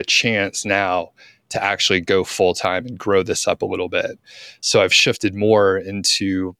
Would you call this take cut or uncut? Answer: cut